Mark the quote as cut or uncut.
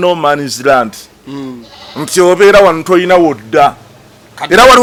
uncut